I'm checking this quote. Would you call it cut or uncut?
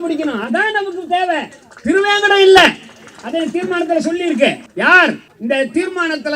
cut